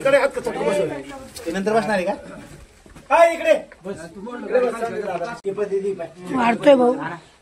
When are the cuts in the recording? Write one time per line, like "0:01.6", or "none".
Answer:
0:05.4